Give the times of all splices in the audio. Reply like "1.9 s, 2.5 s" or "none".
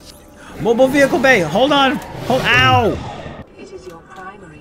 3.5 s